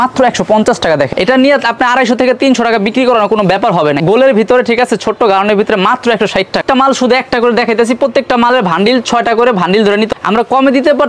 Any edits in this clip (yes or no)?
yes